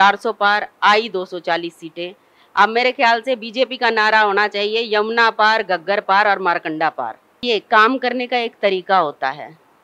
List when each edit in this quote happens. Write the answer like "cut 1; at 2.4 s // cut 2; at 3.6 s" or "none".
cut 1; at 7.4 s